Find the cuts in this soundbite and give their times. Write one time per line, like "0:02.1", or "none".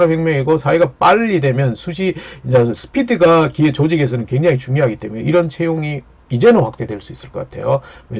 none

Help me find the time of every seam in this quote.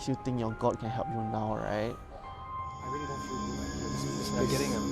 0:02.1

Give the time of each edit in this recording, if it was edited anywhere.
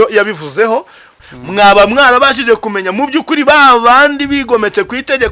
0:01.2

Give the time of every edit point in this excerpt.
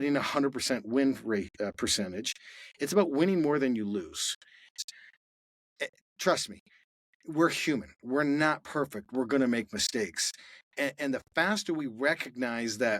0:04.7

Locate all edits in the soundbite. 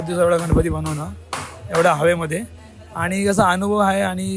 none

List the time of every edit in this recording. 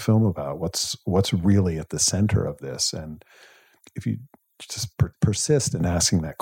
0:03.8
0:05.1

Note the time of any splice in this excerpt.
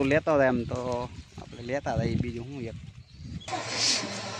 0:03.5

